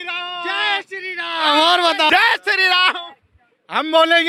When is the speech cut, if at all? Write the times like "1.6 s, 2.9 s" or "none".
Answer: none